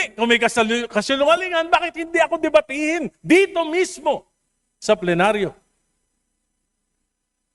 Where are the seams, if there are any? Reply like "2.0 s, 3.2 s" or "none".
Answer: none